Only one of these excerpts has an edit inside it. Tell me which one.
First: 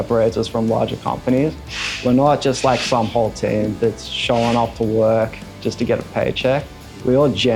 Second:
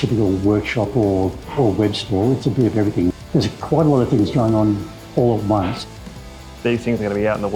second; 2 cuts; at 3.2 s, 5.9 s

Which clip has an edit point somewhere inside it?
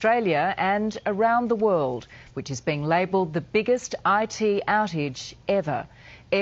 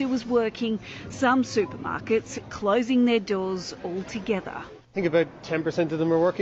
second; 1 cut; at 2.9 s

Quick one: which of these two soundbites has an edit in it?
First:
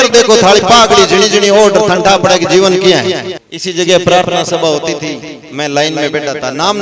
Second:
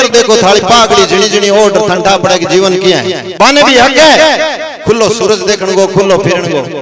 first; 1 cut; at 3.3 s

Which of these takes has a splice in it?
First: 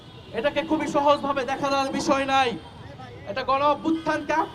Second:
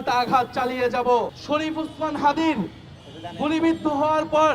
second; 1 cut; at 1.4 s

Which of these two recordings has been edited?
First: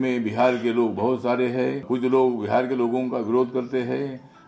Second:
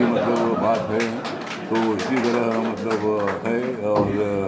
first; 1 cut; at 1.8 s

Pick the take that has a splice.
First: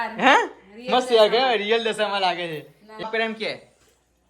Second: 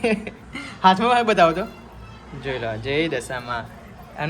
first; 1 cut; at 3.1 s

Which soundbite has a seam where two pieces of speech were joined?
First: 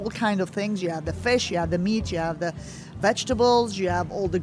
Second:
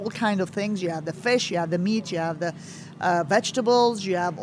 first; 1 cut; at 3.0 s

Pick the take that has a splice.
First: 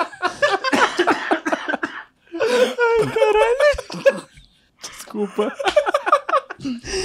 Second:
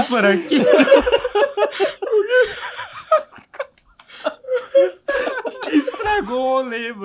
first; 1 cut; at 4.6 s

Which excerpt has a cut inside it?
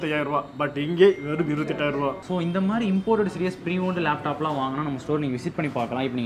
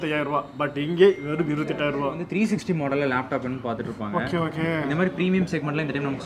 second; 1 cut; at 2.2 s

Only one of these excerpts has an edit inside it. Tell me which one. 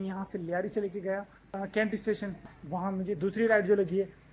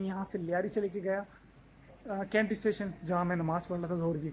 first; 2 cuts; at 1.4 s, 2.5 s

